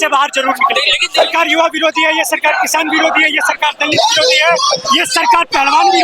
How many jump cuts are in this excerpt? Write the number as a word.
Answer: one